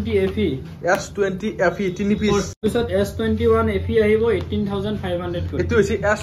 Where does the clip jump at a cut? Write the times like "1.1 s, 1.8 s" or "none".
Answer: 2.6 s

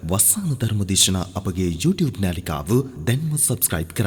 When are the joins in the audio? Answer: none

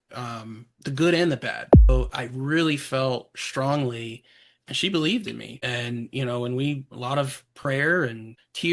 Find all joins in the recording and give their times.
1.9 s

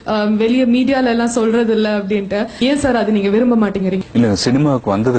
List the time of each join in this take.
2.6 s, 4.0 s

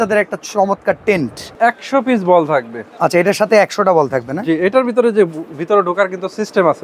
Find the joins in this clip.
1.5 s

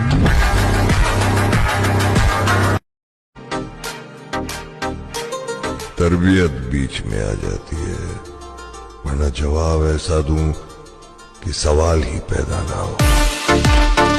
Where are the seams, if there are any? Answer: 2.9 s

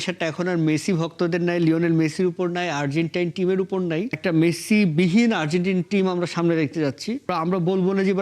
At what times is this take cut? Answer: 4.2 s, 7.3 s

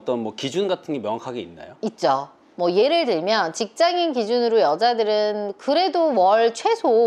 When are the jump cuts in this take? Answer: none

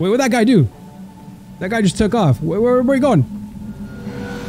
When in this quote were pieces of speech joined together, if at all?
none

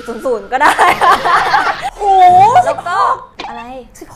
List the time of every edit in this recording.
1.9 s

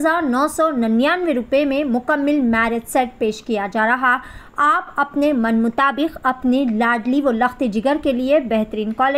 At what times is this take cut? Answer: none

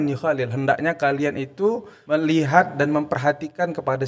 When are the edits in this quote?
1.9 s

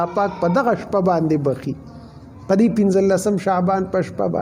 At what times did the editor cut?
none

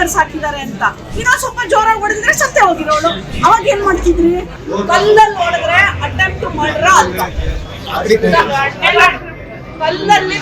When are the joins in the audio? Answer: 4.6 s

